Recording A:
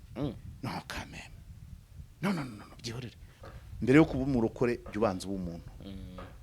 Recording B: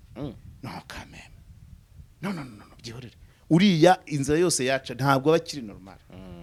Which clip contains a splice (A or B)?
A